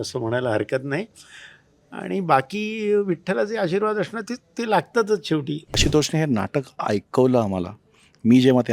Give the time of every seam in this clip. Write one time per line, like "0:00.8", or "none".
0:05.8